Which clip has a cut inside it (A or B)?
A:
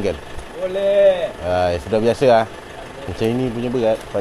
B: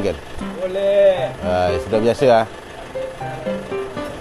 A